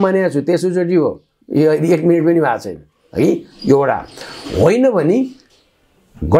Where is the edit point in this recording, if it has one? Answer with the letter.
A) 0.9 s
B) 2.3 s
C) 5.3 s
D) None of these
D